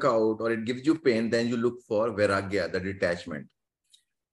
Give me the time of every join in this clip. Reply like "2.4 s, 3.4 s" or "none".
none